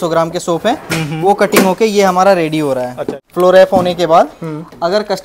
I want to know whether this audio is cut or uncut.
cut